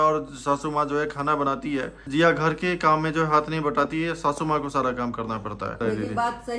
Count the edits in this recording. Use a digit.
2